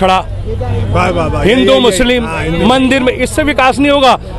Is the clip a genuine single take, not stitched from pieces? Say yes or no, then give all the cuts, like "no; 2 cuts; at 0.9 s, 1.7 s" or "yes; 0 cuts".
yes; 0 cuts